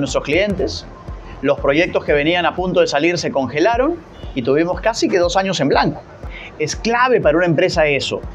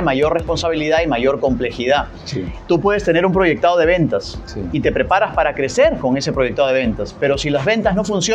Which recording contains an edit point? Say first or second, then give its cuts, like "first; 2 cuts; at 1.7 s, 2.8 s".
first; 1 cut; at 6.4 s